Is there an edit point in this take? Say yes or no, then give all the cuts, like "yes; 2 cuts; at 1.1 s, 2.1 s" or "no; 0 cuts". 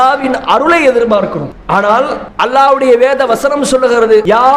yes; 2 cuts; at 1.6 s, 2.2 s